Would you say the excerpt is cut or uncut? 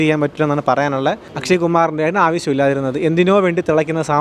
cut